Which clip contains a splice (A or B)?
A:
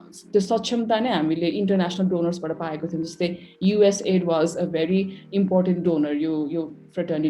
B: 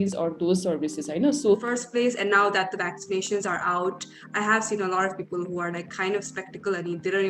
B